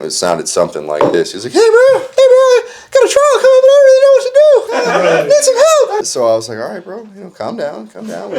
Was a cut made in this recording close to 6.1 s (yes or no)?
yes